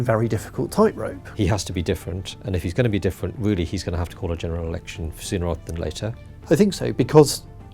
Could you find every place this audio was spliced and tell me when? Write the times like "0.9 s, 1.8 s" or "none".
1.2 s, 6.3 s